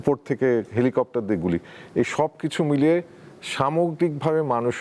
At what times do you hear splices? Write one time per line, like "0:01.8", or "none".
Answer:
none